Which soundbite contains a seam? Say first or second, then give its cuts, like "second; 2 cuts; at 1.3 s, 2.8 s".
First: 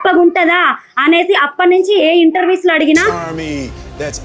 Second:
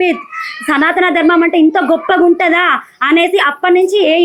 first; 1 cut; at 3.1 s